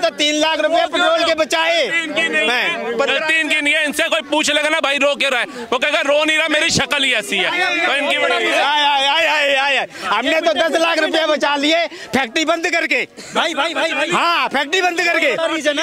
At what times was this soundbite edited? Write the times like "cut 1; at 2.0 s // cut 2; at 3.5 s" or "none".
none